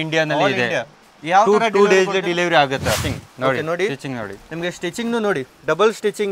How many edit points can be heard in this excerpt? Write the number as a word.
one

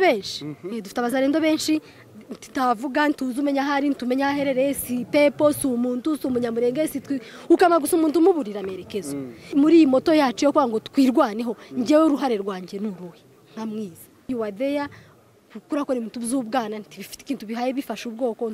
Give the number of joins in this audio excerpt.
one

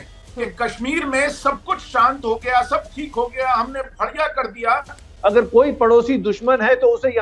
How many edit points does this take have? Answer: one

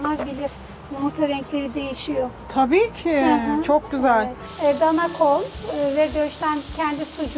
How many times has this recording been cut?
one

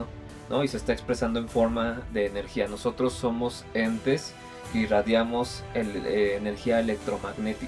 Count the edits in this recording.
zero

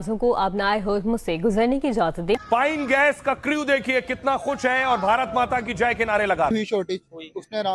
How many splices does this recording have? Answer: two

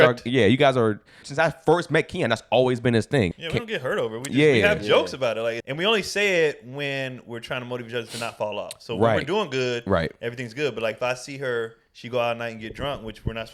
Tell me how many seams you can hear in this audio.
three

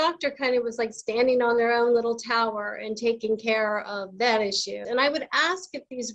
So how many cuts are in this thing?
one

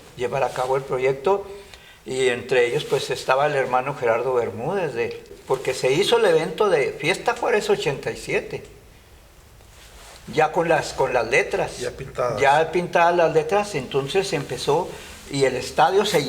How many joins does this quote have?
one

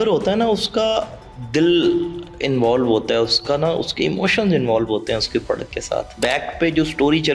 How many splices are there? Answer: one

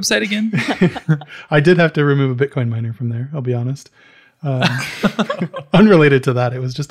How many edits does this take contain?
zero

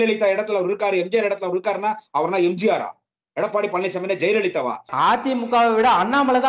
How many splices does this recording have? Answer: one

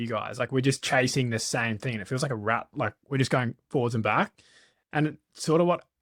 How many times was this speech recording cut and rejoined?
zero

